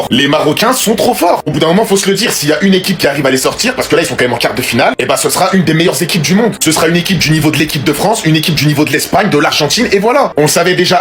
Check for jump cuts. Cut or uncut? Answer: uncut